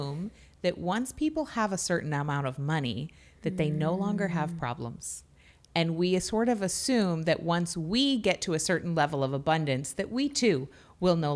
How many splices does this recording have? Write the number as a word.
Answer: zero